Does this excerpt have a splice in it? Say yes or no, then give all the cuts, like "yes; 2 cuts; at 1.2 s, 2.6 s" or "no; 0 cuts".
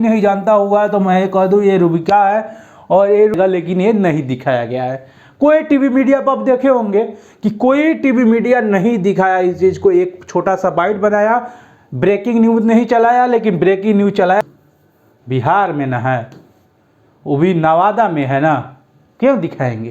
yes; 2 cuts; at 3.3 s, 14.4 s